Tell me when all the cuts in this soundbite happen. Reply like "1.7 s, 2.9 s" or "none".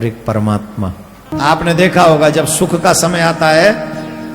1.3 s